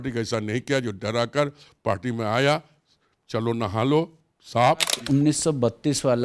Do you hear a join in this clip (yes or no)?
yes